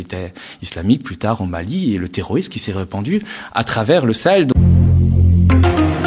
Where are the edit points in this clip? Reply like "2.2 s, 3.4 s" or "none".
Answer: 4.5 s